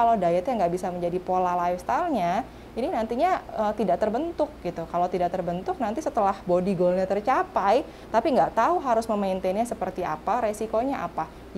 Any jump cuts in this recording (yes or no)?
no